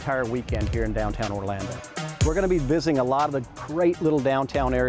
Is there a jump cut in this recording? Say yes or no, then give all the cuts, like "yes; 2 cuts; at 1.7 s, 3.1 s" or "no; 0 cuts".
yes; 1 cut; at 2.0 s